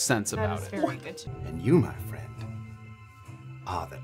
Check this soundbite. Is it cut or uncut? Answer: cut